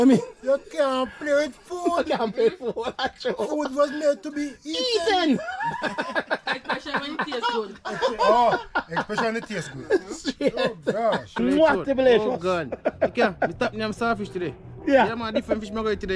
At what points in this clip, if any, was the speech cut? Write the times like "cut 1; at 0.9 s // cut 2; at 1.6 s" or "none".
cut 1; at 11.4 s